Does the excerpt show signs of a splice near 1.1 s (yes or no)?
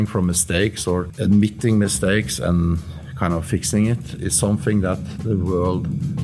yes